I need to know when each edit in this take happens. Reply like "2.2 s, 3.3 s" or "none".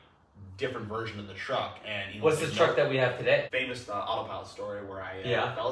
3.5 s